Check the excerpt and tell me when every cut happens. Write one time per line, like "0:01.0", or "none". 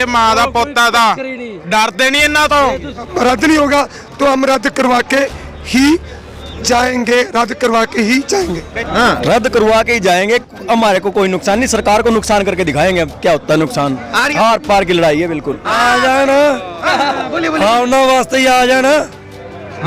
0:03.1
0:08.7
0:14.3
0:15.7